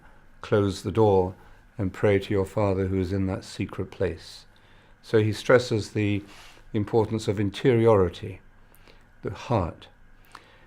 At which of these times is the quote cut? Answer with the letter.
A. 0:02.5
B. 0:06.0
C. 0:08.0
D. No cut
A